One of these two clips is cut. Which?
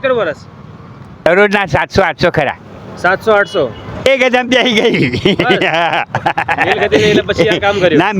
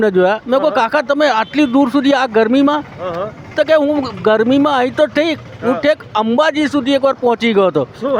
first; 2 cuts; at 1.3 s, 4.0 s

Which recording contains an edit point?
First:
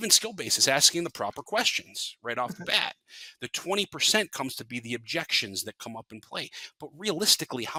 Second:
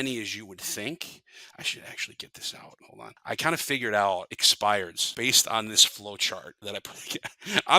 second; 4 cuts; at 2.9 s, 4.4 s, 5.0 s, 6.5 s

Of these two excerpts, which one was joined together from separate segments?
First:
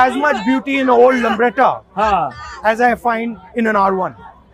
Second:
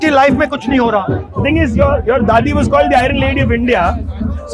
second; 1 cut; at 1.3 s

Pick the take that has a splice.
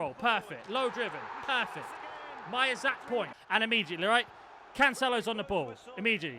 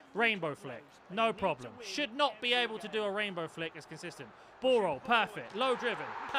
first; 1 cut; at 3.4 s

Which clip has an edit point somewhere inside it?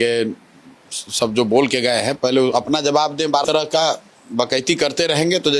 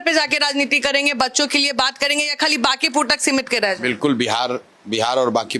first; 1 cut; at 3.4 s

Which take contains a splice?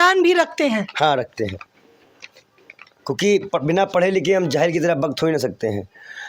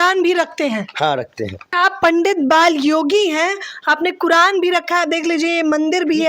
second; 1 cut; at 1.7 s

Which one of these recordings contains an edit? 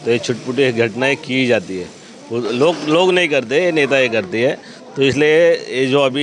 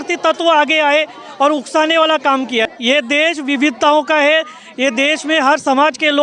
second; 1 cut; at 2.7 s

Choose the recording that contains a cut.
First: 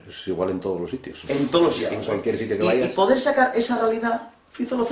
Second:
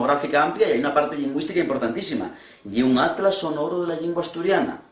first; 1 cut; at 3.5 s

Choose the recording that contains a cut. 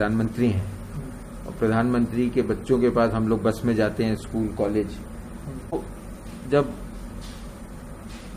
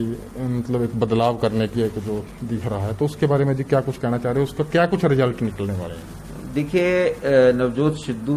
first; 1 cut; at 5.7 s

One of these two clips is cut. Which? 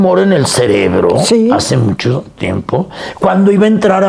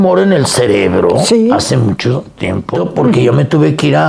second; 1 cut; at 2.7 s

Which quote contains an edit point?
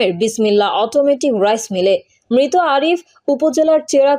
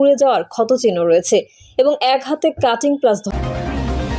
second; 1 cut; at 3.3 s

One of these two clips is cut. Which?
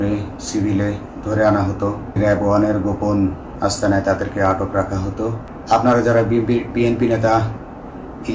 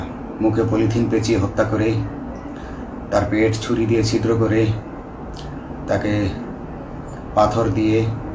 first; 2 cuts; at 2.2 s, 5.5 s

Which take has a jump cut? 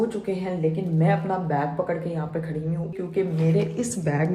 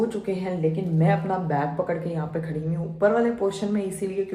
first; 1 cut; at 3.0 s

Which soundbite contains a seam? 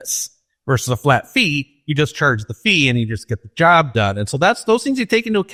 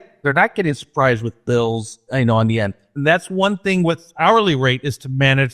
second; 3 cuts; at 2.0 s, 2.8 s, 4.1 s

